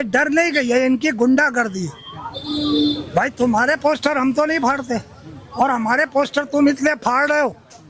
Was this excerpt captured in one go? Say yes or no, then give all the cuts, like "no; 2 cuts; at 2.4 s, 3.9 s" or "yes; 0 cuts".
yes; 0 cuts